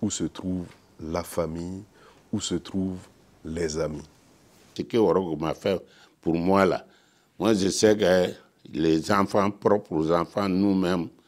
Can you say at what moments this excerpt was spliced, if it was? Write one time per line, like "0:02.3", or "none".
0:04.8